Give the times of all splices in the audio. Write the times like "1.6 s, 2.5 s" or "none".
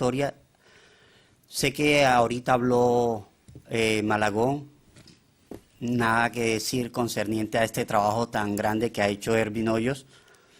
7.9 s